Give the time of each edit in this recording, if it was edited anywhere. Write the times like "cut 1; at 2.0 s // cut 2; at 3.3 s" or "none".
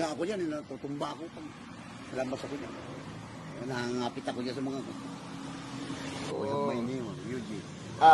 cut 1; at 6.3 s